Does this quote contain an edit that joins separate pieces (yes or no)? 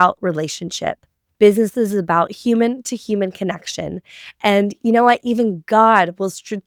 no